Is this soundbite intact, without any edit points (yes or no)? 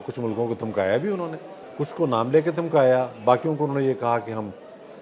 no